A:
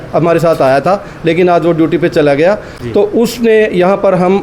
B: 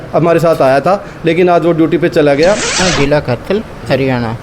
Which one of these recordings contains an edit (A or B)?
B